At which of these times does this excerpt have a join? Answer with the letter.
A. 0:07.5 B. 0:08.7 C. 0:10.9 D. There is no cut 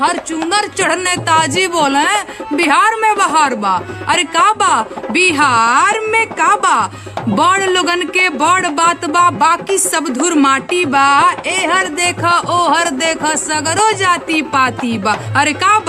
A